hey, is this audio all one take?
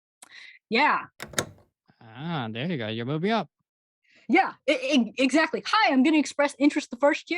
no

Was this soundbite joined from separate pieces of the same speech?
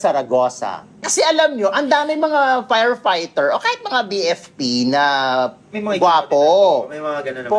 yes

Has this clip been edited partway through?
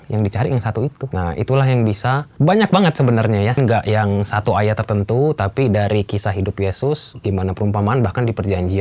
yes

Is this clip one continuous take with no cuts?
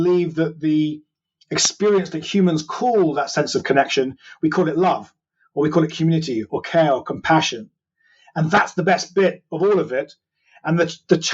yes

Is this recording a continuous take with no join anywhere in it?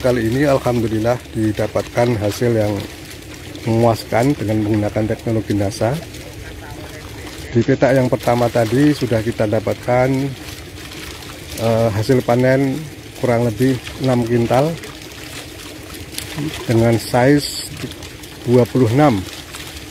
yes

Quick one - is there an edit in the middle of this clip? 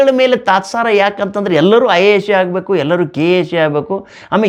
no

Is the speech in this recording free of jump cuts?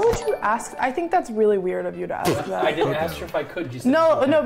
yes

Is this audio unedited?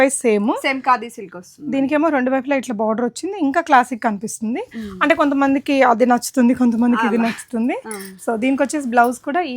yes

